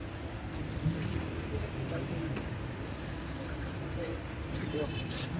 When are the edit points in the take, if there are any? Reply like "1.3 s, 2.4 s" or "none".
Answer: none